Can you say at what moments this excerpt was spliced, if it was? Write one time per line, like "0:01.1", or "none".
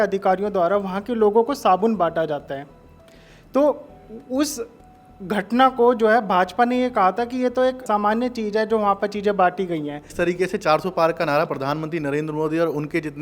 0:07.8
0:10.1